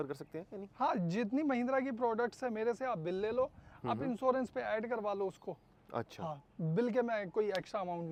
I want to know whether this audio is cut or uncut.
uncut